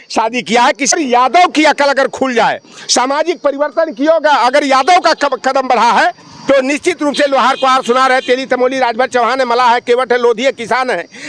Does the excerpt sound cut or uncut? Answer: cut